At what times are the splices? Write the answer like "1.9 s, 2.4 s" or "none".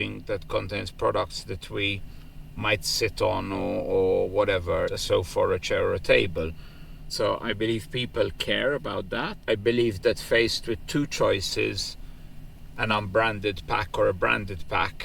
5.0 s, 7.0 s, 9.4 s